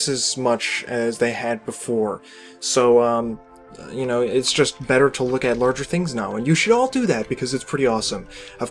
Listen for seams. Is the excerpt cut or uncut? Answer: cut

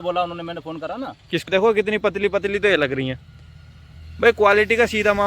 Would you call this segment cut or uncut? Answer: cut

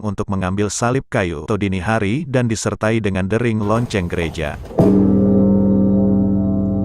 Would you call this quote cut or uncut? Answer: cut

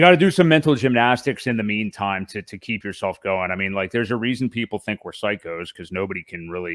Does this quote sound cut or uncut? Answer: uncut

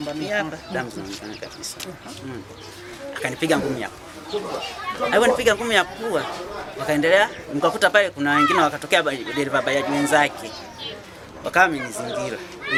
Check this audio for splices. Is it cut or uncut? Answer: uncut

